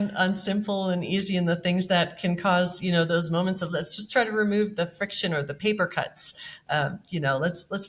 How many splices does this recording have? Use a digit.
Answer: 0